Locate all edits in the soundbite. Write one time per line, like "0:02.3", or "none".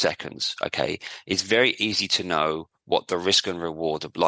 none